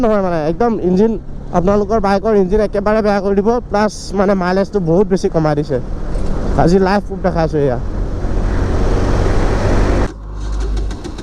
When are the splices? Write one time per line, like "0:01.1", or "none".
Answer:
0:10.1